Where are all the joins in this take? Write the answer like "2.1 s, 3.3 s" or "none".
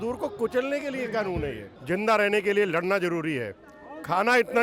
1.7 s